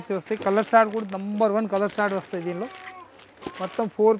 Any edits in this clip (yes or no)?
no